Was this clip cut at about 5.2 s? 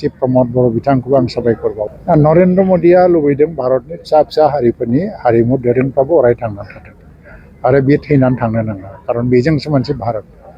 no; 1 cut; at 1.9 s

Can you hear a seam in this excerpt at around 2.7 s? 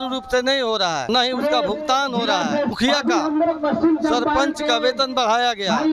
yes; 2 cuts; at 1.1 s, 2.7 s

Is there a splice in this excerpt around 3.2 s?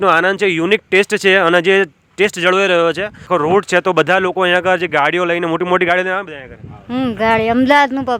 yes; 1 cut; at 3.2 s

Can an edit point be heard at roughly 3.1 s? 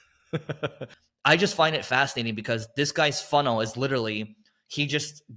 no; 1 cut; at 0.9 s

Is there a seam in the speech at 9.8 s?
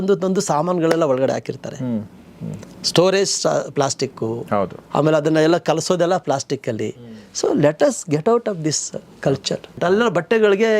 yes; 1 cut; at 9.8 s

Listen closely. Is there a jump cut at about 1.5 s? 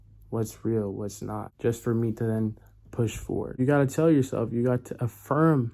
yes; 2 cuts; at 1.5 s, 3.6 s

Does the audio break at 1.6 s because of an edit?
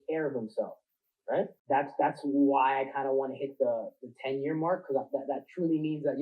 yes; 1 cut; at 1.6 s

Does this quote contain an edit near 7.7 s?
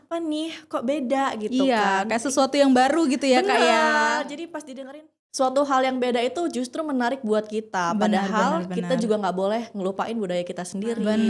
no; 1 cut; at 5.2 s

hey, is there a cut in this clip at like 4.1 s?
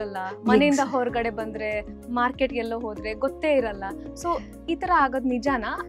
no; 0 cuts

